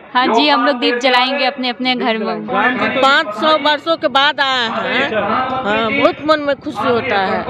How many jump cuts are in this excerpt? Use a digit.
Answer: 1